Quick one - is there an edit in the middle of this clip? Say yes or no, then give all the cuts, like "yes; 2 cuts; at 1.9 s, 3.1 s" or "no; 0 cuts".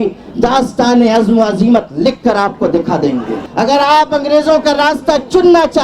yes; 1 cut; at 3.4 s